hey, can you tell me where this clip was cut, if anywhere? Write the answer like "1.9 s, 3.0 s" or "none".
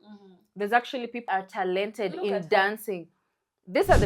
1.2 s